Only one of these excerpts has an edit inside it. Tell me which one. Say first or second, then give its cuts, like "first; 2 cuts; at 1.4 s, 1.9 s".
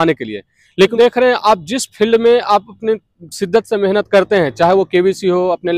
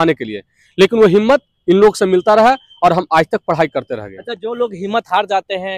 first; 1 cut; at 0.9 s